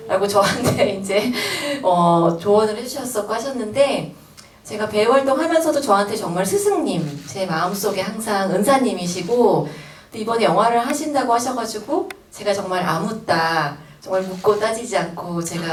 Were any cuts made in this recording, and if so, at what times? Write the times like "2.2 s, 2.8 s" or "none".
none